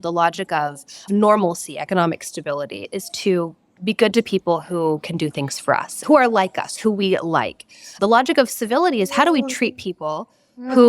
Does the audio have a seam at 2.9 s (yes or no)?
yes